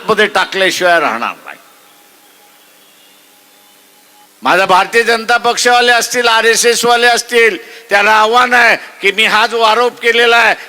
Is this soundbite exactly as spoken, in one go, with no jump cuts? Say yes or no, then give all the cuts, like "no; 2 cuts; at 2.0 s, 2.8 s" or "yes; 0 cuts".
no; 1 cut; at 4.3 s